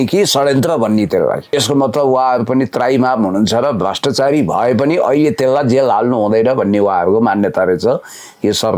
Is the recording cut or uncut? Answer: cut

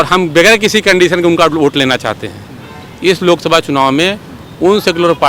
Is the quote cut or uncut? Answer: uncut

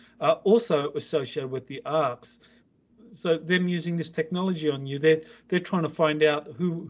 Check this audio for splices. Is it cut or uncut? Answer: cut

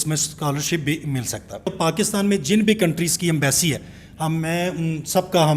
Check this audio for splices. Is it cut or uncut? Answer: cut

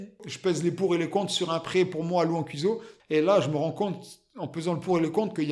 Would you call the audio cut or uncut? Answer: uncut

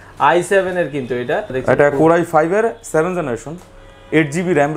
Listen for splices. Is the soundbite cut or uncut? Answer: cut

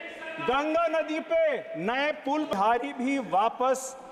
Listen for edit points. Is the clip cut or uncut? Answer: cut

